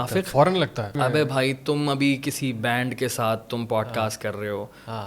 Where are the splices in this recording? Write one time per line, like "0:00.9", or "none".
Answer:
0:00.9